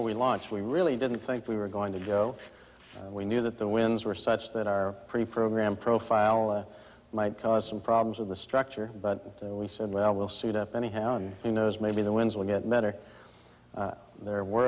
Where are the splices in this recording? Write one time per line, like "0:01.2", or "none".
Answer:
none